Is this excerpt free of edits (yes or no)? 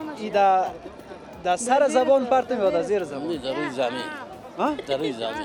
yes